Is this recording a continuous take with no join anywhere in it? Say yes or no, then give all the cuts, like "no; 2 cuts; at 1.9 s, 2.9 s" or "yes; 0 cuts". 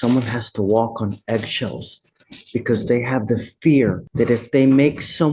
no; 1 cut; at 4.0 s